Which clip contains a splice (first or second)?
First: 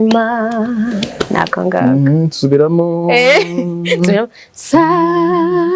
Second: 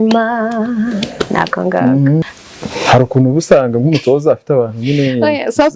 second